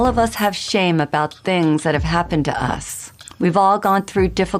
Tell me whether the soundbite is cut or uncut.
uncut